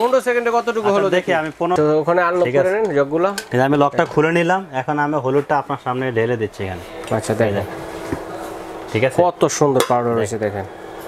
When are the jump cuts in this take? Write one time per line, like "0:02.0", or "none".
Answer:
0:01.8

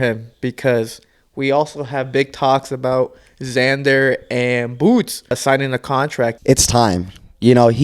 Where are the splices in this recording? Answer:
0:05.4
0:06.4

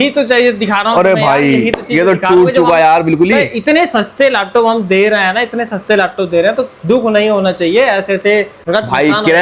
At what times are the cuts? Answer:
none

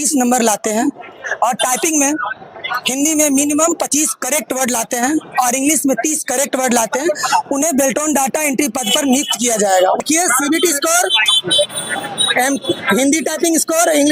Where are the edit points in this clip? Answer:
0:10.0

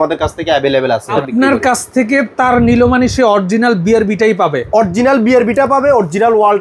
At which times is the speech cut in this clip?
0:01.1

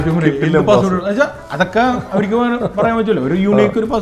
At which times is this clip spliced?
none

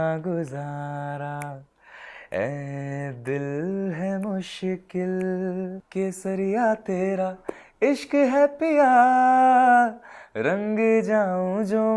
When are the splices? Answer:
0:05.8

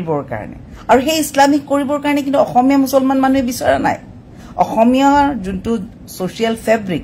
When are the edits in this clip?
none

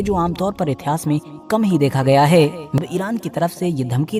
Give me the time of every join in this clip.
0:02.8

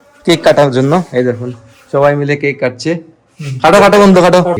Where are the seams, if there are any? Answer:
none

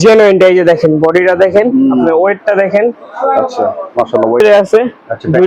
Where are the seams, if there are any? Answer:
0:04.4

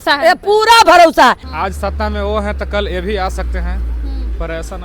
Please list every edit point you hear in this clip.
0:01.5

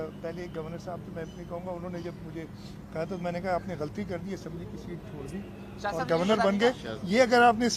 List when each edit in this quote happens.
none

